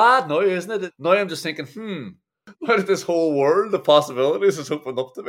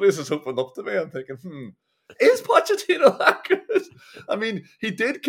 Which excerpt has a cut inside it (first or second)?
first